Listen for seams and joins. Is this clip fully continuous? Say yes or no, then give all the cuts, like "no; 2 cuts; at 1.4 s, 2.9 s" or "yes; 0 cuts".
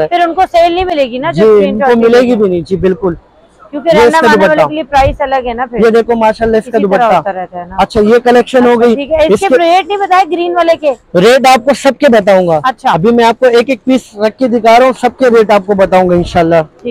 yes; 0 cuts